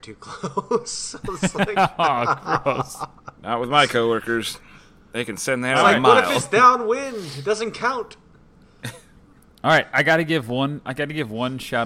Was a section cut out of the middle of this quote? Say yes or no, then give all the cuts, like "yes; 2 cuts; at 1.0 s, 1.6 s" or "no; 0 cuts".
no; 0 cuts